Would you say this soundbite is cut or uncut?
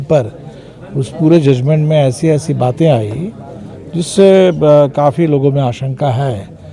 uncut